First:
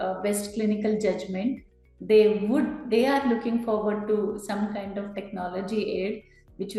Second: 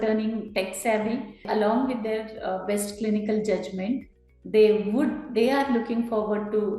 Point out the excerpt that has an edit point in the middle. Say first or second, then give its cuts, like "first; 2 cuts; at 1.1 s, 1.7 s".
second; 1 cut; at 1.4 s